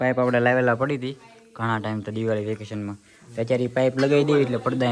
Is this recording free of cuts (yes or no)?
yes